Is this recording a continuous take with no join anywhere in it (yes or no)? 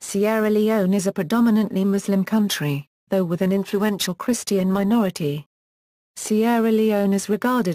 yes